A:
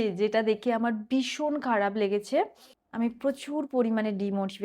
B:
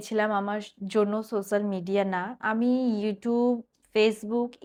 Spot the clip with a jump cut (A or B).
A